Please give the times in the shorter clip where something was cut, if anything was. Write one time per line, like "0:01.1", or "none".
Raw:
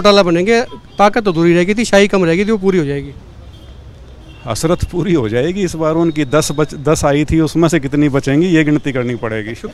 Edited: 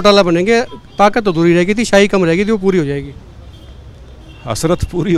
none